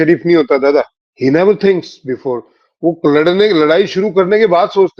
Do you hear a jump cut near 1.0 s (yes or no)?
yes